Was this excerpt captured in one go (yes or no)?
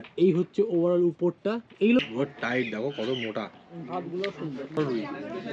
no